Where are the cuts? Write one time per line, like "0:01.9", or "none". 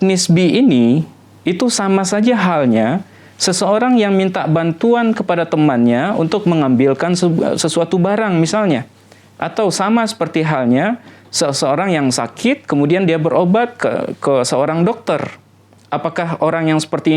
none